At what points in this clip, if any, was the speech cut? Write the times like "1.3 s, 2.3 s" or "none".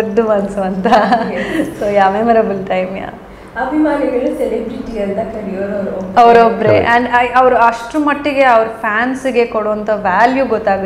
none